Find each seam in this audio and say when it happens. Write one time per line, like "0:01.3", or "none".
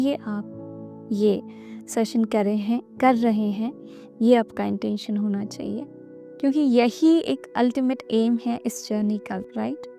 none